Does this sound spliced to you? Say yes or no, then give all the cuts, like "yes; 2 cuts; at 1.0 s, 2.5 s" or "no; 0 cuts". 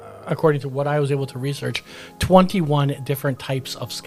no; 0 cuts